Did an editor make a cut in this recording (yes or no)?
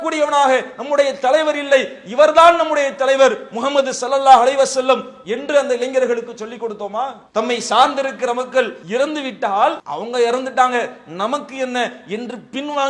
yes